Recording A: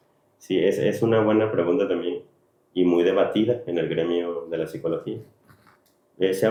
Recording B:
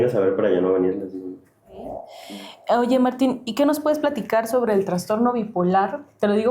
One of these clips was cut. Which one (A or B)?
B